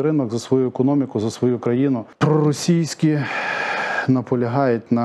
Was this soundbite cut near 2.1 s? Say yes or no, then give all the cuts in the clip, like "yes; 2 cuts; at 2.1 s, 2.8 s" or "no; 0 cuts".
yes; 1 cut; at 2.1 s